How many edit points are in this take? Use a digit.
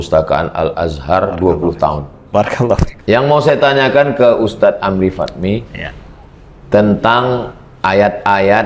1